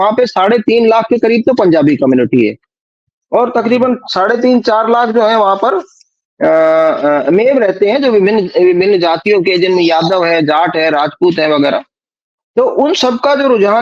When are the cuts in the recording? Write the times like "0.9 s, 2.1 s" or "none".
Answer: none

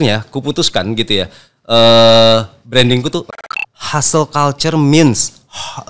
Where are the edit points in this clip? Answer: 3.3 s

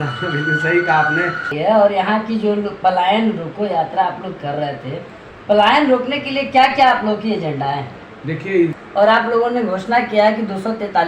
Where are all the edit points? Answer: 1.5 s, 8.8 s

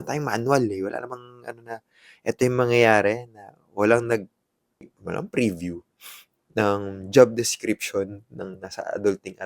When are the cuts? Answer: 5.0 s

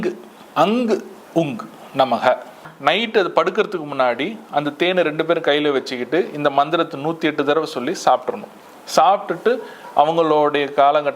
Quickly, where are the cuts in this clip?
2.6 s

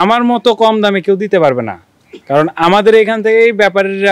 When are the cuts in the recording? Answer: none

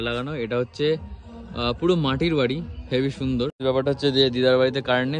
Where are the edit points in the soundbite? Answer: 3.6 s

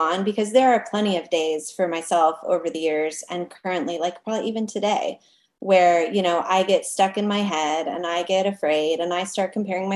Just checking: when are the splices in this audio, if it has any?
none

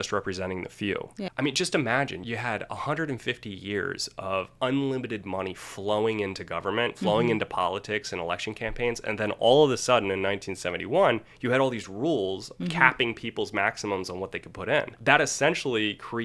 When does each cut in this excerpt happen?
1.2 s, 2.2 s

